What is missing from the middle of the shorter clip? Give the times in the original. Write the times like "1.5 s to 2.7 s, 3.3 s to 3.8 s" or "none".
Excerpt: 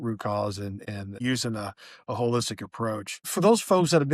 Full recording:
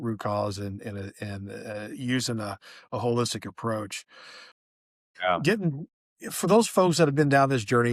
1.1 s to 2.0 s, 4.0 s to 6.2 s